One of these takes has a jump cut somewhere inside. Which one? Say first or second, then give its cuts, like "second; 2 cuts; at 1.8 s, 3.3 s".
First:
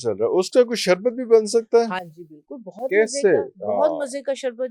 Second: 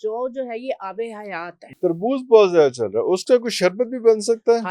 second; 1 cut; at 1.6 s